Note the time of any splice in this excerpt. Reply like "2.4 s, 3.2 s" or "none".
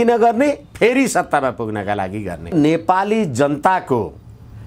2.5 s